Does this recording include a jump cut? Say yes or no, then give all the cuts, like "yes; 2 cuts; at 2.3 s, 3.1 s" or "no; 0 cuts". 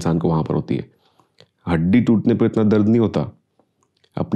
no; 0 cuts